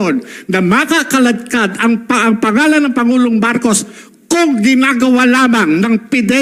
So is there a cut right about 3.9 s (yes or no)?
no